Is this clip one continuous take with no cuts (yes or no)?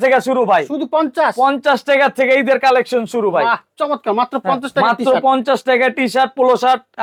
yes